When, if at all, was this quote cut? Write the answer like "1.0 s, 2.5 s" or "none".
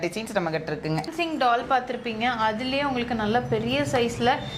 1.1 s